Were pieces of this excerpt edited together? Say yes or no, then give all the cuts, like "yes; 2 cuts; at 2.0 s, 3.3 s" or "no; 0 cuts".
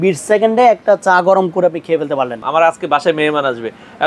yes; 1 cut; at 2.4 s